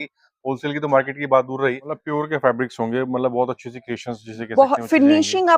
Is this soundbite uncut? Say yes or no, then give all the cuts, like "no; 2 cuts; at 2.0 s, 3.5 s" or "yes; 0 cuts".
no; 1 cut; at 1.9 s